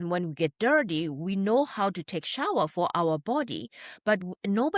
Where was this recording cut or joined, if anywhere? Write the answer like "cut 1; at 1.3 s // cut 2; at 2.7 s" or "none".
none